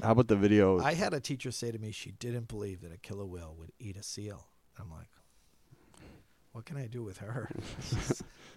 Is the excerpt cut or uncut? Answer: uncut